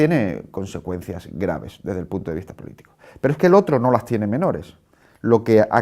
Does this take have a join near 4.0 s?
no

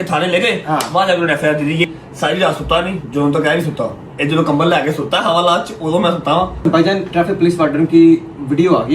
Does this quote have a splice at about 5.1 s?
no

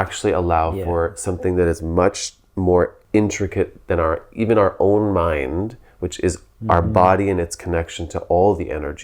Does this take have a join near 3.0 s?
yes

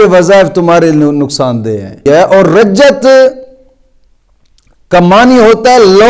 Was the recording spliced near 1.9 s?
yes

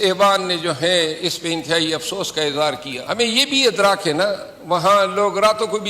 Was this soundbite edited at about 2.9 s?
yes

